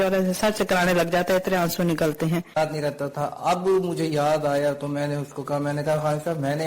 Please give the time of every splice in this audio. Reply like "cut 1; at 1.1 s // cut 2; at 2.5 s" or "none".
cut 1; at 2.6 s